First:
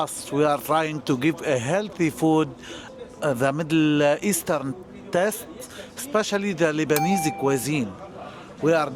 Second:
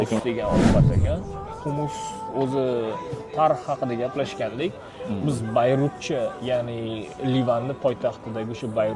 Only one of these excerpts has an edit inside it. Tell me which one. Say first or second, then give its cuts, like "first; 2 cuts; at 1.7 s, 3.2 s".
first; 1 cut; at 2.9 s